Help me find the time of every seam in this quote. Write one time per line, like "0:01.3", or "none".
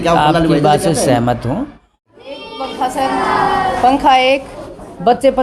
0:02.1